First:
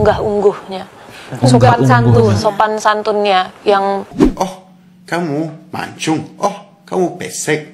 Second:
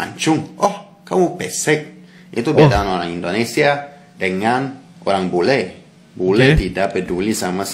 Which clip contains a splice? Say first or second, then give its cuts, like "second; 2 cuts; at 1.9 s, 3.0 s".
first; 1 cut; at 4.2 s